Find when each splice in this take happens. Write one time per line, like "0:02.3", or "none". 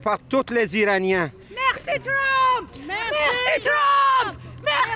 none